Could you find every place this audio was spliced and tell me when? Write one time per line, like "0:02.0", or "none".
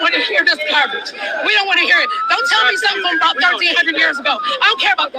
none